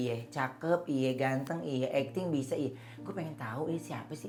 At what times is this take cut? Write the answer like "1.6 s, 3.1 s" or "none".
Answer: none